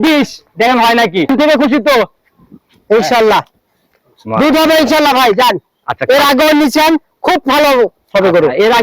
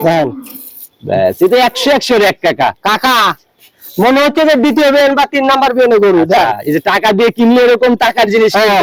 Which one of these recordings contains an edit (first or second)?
first